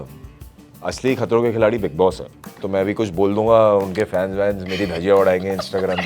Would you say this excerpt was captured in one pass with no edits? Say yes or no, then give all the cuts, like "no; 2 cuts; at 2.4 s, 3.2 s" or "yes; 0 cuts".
no; 1 cut; at 2.5 s